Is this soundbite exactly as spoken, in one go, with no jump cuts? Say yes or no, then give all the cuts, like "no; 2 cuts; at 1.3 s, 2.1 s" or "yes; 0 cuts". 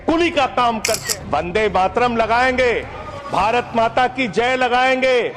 no; 1 cut; at 1.0 s